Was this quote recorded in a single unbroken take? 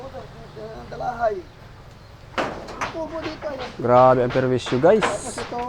no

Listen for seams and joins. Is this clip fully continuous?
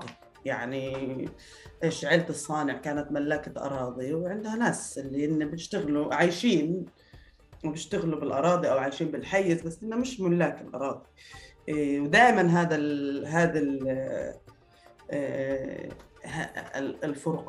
yes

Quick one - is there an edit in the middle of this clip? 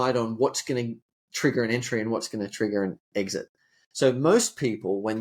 no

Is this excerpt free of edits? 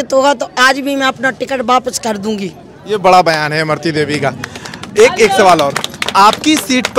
yes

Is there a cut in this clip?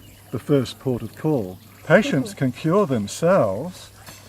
yes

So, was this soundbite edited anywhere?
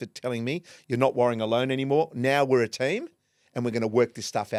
no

